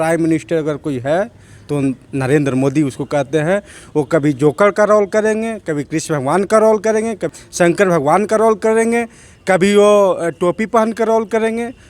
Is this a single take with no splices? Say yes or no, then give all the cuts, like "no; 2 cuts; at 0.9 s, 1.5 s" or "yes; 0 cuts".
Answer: no; 1 cut; at 7.4 s